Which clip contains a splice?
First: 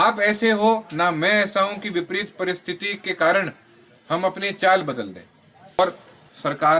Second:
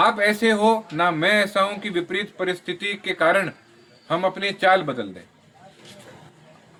first; 1 cut; at 5.8 s

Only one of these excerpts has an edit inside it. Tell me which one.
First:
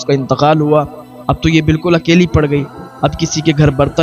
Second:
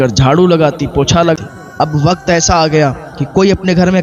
second; 1 cut; at 1.4 s

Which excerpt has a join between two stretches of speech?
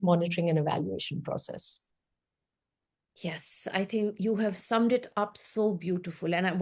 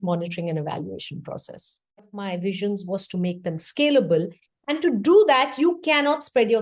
second; 1 cut; at 2.2 s

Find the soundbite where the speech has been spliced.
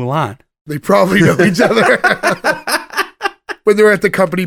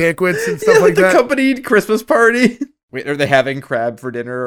second; 1 cut; at 2.9 s

